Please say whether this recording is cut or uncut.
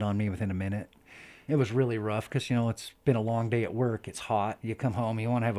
cut